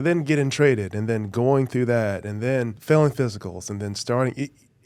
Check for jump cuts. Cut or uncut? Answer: cut